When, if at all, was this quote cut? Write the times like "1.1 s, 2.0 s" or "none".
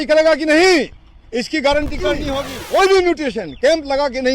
2.2 s